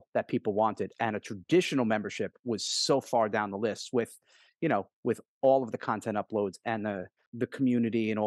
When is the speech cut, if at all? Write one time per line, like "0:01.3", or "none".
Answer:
0:07.2